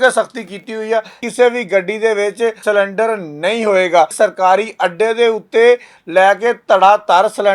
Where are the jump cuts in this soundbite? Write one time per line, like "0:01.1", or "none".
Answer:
0:01.2
0:02.6
0:04.1